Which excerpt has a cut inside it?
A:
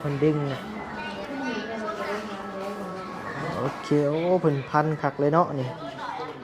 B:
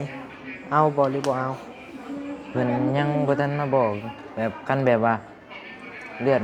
A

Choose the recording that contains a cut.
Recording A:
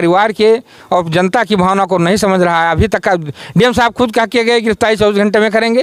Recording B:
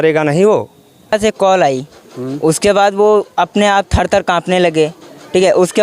B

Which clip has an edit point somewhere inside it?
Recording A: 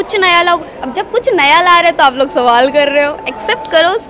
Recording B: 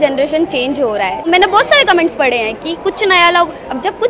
B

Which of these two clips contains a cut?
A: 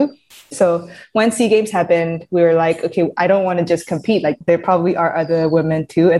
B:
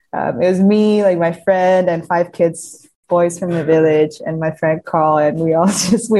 A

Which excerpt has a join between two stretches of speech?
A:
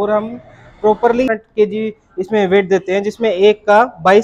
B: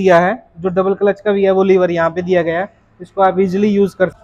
A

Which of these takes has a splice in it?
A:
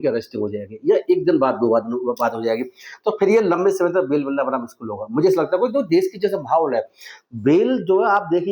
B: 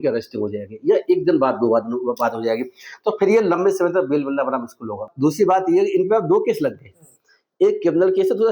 B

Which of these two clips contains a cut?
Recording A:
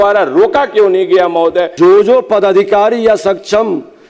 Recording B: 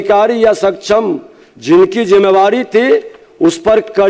A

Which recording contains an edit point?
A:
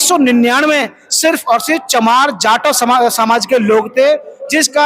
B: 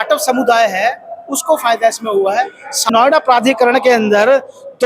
B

